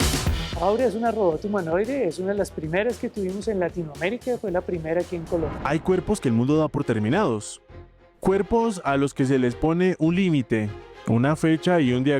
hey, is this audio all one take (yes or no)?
no